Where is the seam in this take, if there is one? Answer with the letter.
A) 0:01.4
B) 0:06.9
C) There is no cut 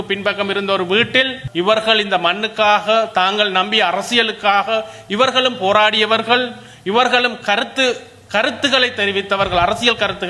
A